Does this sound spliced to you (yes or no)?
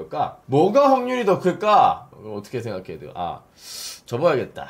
yes